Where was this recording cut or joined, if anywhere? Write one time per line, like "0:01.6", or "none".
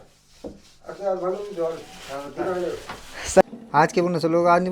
0:03.4